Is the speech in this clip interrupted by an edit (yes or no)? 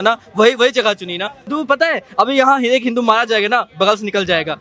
yes